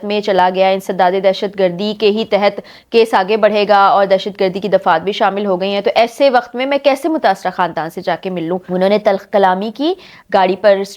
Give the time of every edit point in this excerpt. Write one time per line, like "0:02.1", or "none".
0:08.6